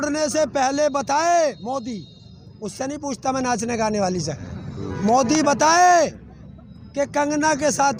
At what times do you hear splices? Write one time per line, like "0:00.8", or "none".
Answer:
none